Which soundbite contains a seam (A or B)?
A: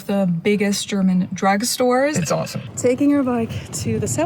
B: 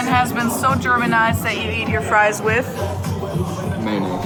A